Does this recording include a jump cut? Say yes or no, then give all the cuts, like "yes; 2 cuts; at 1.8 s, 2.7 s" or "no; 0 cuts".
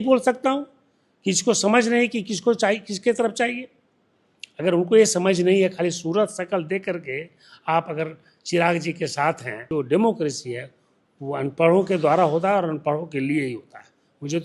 yes; 1 cut; at 9.7 s